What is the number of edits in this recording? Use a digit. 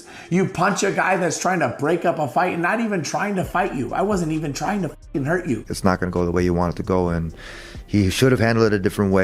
1